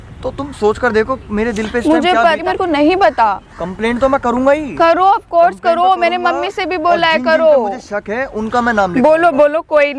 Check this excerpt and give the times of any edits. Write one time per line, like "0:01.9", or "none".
0:02.4